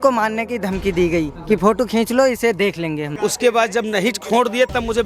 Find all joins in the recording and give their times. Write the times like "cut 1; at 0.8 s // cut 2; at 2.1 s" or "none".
cut 1; at 1.4 s // cut 2; at 3.1 s